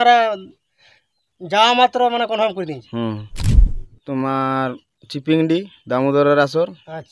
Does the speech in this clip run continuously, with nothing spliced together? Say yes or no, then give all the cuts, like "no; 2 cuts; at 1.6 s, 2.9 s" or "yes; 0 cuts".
no; 1 cut; at 3.5 s